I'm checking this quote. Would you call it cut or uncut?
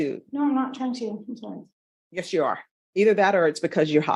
uncut